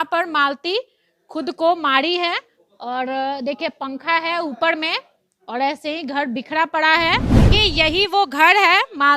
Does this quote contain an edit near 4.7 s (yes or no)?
no